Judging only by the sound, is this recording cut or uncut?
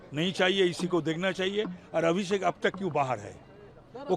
uncut